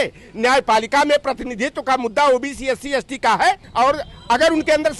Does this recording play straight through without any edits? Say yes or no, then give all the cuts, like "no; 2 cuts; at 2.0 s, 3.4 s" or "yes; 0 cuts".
no; 1 cut; at 3.6 s